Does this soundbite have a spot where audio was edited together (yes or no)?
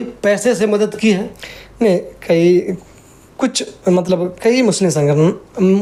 no